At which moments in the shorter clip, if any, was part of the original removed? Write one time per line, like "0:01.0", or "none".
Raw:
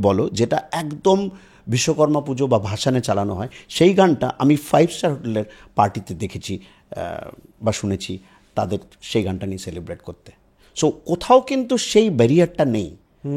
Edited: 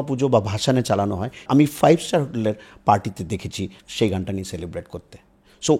0:01.4
0:03.8